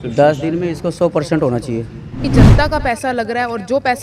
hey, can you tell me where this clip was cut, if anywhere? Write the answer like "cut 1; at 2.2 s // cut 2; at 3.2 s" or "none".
cut 1; at 2.3 s